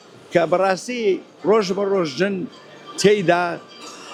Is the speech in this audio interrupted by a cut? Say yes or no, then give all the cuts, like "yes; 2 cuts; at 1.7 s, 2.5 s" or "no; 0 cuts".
no; 0 cuts